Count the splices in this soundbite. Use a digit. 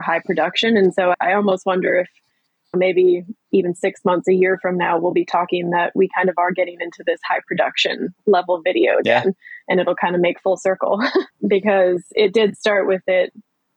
1